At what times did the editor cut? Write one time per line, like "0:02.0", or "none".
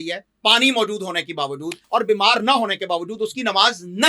0:01.7